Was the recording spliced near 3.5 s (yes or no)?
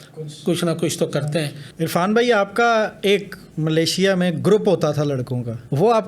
no